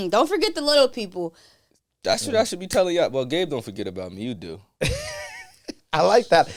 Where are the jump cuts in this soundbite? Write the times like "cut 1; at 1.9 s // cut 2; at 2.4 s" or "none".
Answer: none